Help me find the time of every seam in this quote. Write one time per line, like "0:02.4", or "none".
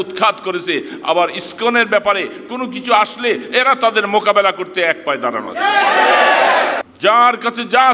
0:06.9